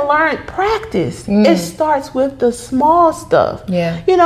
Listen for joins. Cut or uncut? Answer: uncut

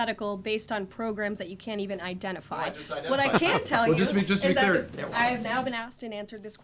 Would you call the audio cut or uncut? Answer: cut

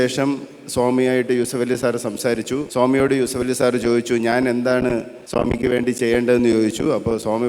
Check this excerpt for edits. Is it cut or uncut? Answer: cut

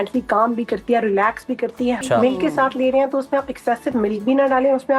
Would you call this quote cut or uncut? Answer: cut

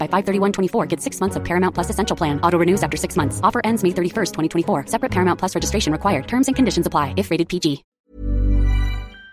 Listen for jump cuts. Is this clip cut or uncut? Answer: cut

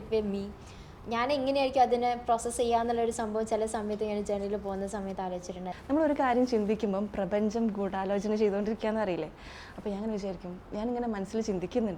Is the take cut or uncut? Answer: cut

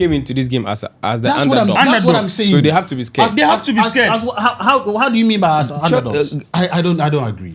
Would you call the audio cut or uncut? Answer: cut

